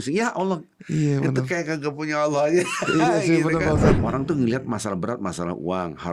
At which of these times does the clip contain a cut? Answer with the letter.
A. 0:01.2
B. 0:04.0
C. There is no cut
B